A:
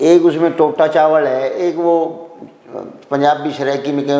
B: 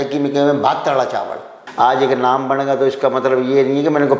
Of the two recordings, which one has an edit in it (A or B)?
B